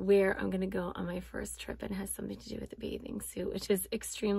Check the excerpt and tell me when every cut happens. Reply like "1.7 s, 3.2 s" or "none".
none